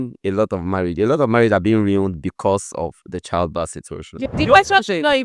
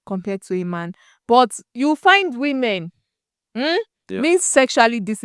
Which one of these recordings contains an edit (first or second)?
first